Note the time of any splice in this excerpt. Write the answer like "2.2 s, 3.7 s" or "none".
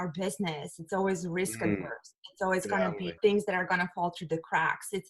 3.2 s